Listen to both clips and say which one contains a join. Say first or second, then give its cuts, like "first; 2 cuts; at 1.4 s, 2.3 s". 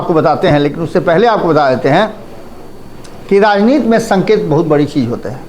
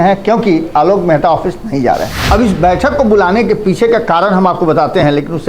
second; 1 cut; at 2.1 s